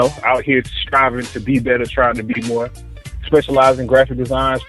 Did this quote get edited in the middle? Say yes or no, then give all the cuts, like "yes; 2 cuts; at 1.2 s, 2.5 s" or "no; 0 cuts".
yes; 1 cut; at 1.1 s